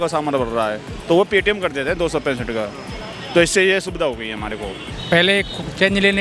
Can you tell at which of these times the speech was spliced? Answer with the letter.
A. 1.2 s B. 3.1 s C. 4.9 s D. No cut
C